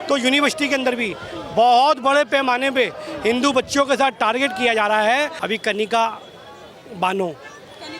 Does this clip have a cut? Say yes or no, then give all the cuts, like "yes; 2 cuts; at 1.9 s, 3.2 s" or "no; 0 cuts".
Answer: yes; 1 cut; at 5.4 s